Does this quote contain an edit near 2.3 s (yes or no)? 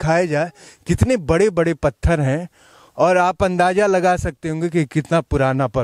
no